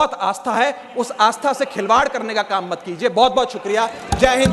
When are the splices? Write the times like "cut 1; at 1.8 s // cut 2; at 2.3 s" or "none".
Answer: none